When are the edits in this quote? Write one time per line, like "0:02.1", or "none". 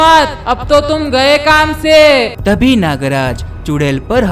0:02.3